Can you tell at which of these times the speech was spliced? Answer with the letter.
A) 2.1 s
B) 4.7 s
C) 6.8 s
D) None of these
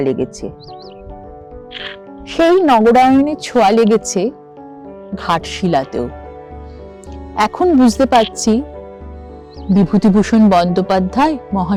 D